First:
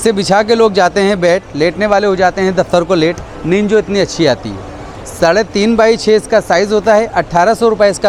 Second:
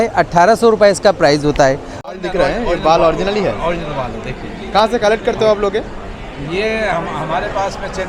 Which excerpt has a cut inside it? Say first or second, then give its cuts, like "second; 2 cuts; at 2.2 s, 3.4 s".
second; 1 cut; at 2.1 s